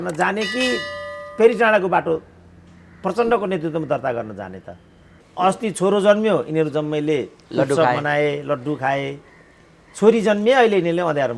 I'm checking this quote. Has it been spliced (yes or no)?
yes